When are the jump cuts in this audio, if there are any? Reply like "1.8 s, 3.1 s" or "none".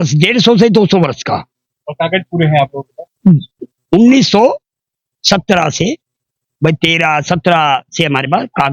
3.7 s